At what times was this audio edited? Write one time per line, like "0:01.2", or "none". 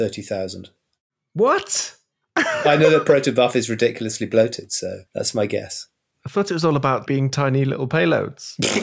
0:05.0
0:07.0